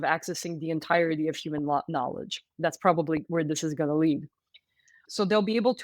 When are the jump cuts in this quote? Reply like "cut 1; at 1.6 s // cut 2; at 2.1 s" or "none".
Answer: cut 1; at 3.3 s // cut 2; at 5.0 s